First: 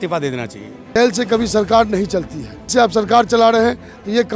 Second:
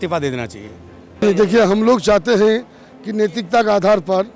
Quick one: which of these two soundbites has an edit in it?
first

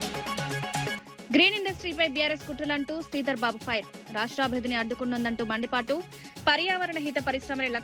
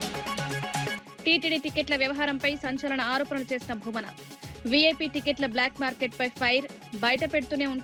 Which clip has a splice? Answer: first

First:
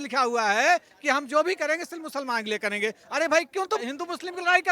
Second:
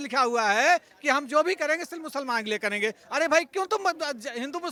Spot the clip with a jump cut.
first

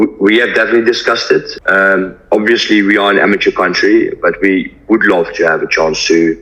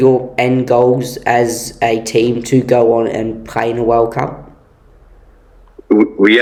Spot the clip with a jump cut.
first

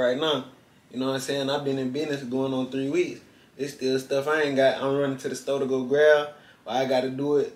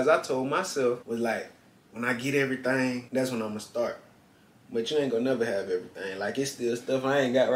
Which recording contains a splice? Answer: second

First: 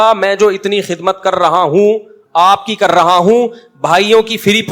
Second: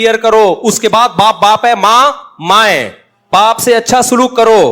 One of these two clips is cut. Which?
second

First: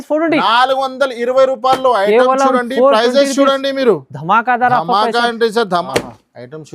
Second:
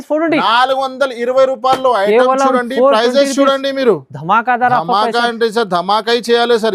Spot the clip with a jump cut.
first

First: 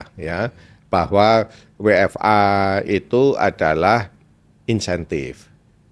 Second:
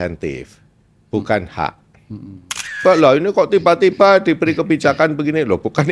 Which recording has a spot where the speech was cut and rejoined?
second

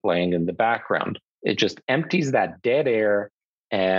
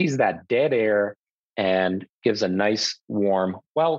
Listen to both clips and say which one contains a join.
first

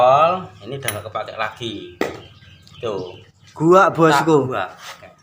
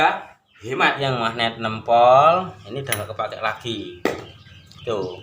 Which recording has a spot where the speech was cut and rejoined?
second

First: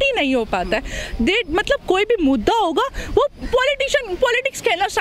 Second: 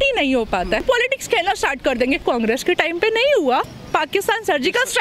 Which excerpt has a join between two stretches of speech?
second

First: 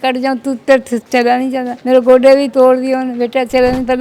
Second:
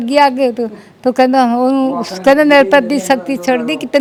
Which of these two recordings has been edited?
first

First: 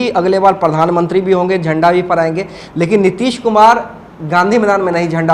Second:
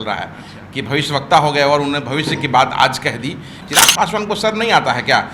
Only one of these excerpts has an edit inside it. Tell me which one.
second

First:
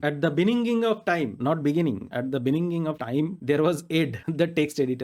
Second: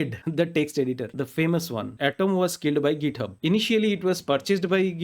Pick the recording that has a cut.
second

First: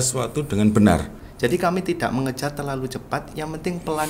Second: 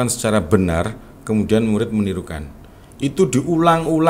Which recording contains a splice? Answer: first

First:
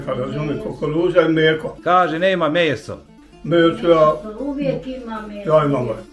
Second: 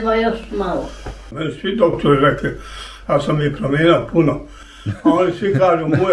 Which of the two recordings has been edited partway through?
second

